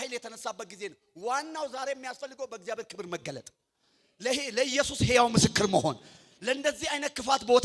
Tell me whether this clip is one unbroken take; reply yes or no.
yes